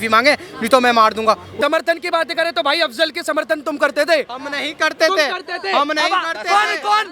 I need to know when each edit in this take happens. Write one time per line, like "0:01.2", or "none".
0:01.5